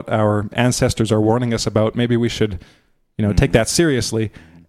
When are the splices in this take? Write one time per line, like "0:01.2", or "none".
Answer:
none